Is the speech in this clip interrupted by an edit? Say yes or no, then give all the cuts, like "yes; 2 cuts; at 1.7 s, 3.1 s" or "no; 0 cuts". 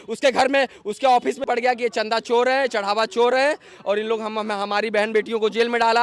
yes; 1 cut; at 1.4 s